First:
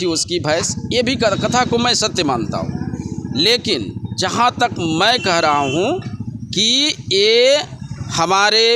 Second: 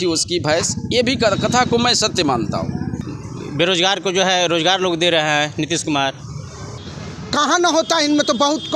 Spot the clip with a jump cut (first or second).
second